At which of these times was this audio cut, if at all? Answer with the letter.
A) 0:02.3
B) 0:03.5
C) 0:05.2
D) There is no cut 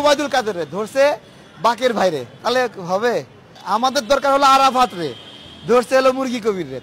B